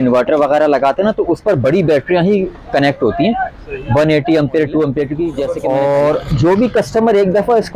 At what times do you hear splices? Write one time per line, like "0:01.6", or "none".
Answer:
0:05.5

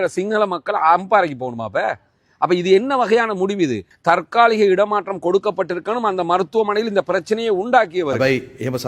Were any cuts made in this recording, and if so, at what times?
0:03.9
0:08.2

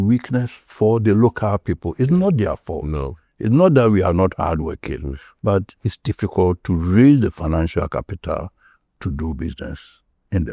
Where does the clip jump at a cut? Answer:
none

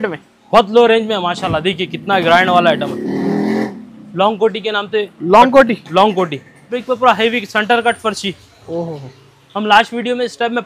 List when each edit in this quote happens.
0:06.8

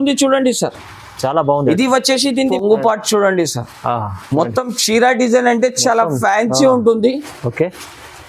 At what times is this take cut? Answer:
0:02.5

